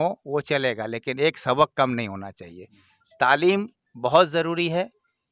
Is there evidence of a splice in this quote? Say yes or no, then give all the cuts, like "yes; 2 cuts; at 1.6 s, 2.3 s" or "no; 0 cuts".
no; 0 cuts